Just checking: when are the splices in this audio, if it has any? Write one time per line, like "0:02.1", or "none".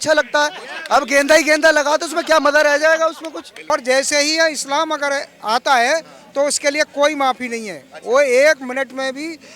0:03.7